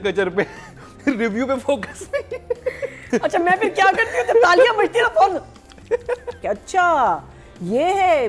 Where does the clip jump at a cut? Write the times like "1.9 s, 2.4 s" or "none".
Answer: 3.1 s, 6.3 s